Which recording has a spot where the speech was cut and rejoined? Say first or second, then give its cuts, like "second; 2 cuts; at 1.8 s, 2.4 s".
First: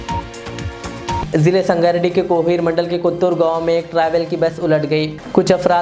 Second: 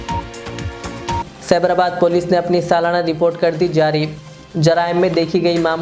second; 1 cut; at 1.2 s